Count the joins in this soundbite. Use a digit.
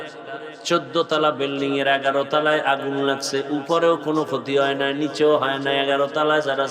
0